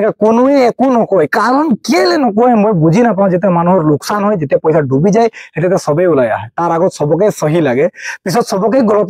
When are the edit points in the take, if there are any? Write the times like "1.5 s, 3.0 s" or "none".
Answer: none